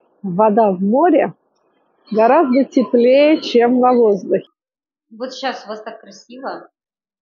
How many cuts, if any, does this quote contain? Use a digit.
1